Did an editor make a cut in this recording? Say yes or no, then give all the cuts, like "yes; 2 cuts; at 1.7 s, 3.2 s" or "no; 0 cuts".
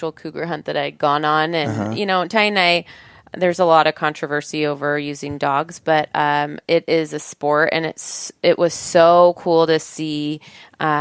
no; 0 cuts